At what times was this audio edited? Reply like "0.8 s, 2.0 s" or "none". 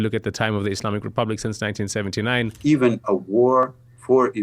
2.6 s